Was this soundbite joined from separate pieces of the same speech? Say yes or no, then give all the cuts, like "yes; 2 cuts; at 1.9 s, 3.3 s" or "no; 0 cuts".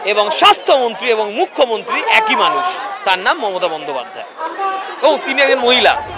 no; 0 cuts